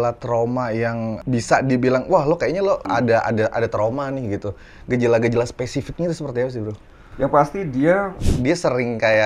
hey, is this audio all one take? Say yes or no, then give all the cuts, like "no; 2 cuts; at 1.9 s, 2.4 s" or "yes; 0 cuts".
no; 1 cut; at 8.1 s